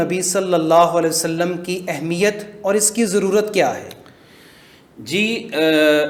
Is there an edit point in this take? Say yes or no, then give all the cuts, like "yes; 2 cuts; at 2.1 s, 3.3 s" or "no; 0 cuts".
no; 0 cuts